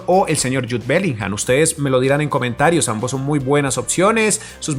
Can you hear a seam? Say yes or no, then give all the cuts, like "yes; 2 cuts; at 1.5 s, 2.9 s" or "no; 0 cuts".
no; 0 cuts